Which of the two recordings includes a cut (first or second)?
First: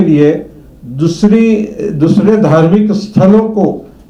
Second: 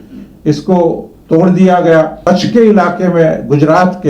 second